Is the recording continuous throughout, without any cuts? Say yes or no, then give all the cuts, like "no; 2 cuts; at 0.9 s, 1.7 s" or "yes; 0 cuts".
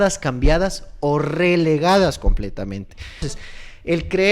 no; 1 cut; at 3.3 s